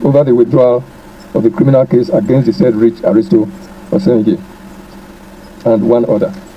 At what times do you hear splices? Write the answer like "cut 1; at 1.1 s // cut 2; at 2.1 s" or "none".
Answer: none